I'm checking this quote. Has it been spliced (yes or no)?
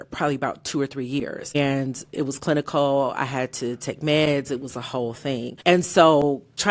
yes